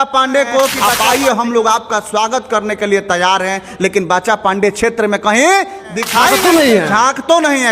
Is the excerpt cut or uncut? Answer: cut